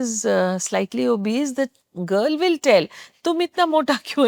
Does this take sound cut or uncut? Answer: uncut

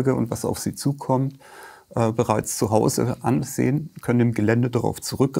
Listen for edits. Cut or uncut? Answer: uncut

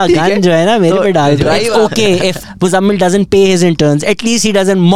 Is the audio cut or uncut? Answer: cut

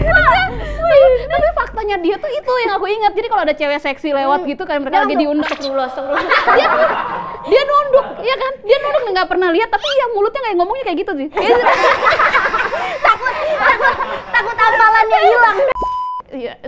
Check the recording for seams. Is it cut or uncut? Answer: cut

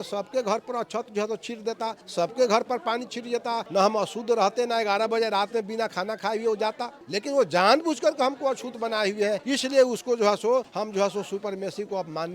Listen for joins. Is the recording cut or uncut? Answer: cut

